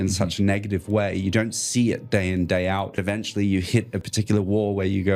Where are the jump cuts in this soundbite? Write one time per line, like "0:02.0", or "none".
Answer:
0:03.0
0:04.1